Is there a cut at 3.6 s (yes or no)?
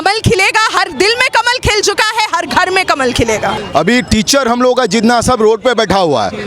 yes